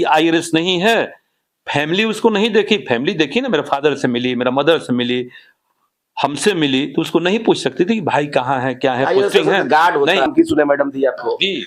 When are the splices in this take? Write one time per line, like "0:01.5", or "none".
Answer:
0:10.3